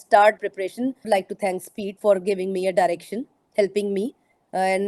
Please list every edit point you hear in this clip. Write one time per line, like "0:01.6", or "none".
0:01.0

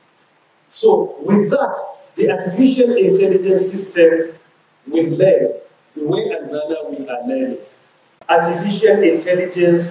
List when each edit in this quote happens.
0:08.1

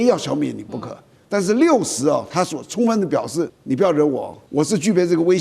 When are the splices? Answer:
0:03.6
0:04.4

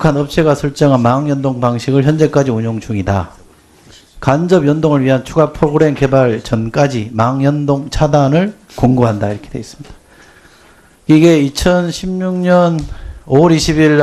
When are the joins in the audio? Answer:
none

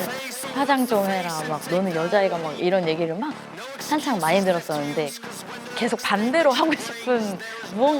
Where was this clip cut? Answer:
0:01.6
0:05.6

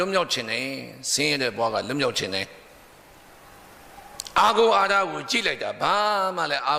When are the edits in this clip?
none

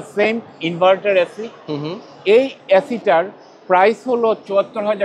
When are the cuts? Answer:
none

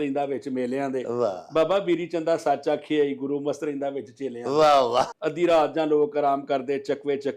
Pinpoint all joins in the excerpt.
0:05.1

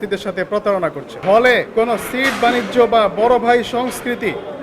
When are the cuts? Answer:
0:01.1
0:01.7

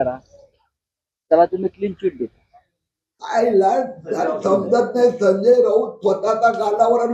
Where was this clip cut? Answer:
0:03.1

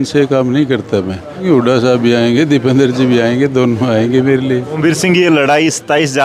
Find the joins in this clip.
0:01.4
0:04.7

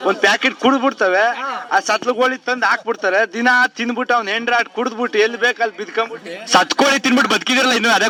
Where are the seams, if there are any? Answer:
none

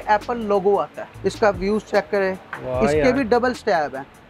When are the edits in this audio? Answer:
0:01.1

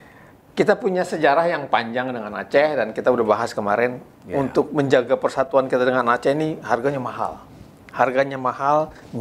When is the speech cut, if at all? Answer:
none

